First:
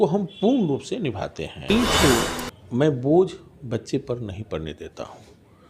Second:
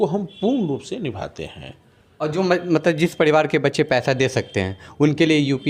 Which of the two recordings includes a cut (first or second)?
first